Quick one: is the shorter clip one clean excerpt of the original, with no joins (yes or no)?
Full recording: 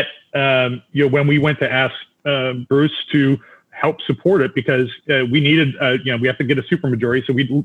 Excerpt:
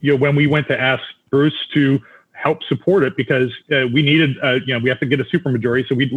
no